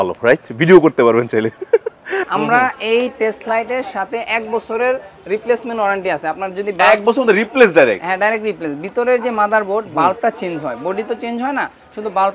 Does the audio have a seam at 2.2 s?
yes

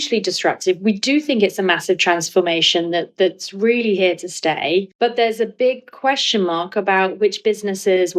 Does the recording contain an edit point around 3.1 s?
no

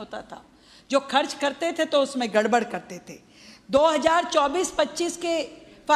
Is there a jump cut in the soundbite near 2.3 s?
yes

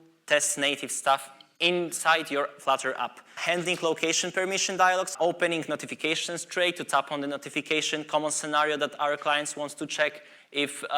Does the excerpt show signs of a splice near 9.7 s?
no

